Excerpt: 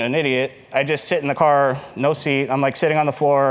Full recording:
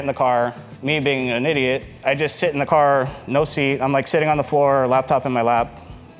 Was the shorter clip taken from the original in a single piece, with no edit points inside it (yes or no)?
yes